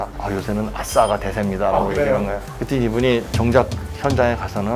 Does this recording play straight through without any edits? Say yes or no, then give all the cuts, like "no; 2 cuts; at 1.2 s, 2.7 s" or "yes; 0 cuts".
yes; 0 cuts